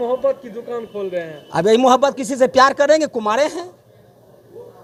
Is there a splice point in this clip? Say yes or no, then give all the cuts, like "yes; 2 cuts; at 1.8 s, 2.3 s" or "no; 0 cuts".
no; 0 cuts